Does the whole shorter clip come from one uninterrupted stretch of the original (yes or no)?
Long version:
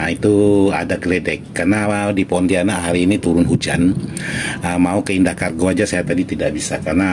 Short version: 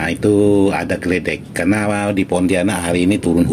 yes